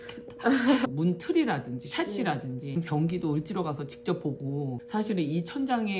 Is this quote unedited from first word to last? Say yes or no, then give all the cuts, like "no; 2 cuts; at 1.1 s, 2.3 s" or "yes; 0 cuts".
no; 3 cuts; at 0.9 s, 2.8 s, 4.7 s